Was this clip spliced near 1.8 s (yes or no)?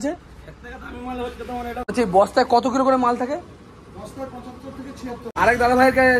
yes